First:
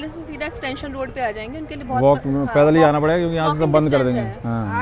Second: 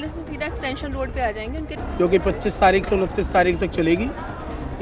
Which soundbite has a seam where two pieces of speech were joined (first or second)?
second